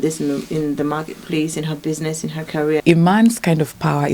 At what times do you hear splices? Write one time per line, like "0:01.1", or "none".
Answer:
0:02.8